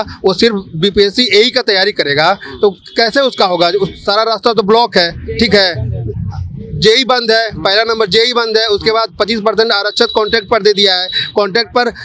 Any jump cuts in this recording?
no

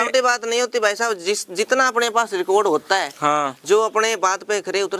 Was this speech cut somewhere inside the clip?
no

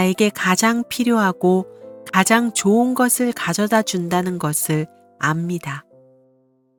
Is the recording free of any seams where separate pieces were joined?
yes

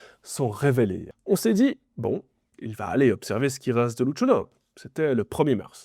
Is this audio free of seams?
no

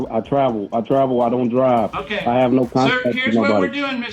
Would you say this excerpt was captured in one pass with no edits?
yes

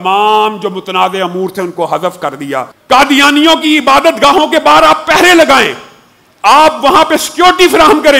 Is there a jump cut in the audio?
yes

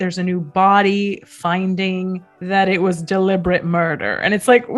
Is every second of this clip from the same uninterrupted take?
yes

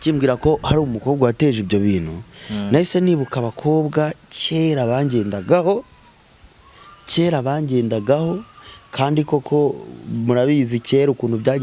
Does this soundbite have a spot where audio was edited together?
no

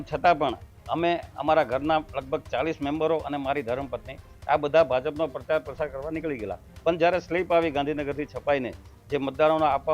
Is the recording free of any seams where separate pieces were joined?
yes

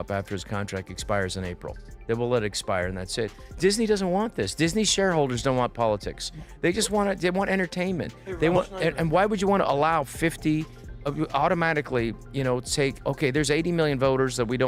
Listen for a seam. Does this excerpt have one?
no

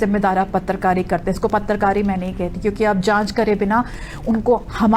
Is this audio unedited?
yes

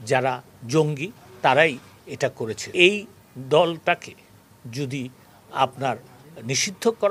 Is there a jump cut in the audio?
yes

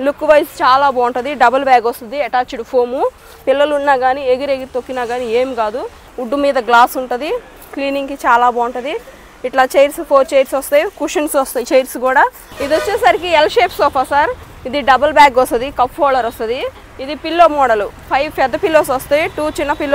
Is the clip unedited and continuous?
no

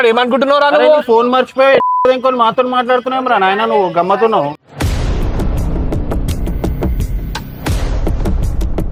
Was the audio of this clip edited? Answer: no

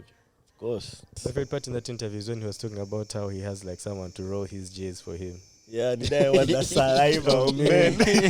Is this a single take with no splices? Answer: no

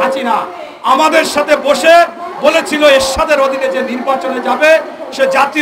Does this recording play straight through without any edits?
yes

